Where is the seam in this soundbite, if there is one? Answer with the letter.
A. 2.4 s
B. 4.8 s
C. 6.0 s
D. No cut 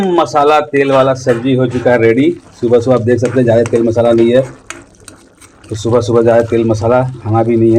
D